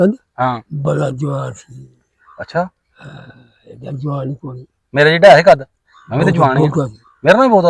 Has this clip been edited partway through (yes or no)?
no